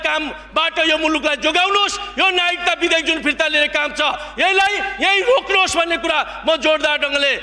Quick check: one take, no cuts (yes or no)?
yes